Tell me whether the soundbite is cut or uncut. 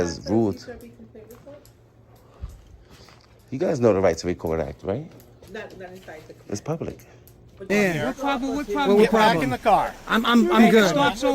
cut